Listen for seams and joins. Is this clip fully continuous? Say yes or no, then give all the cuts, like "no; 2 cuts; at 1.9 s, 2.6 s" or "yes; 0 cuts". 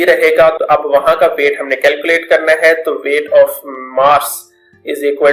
yes; 0 cuts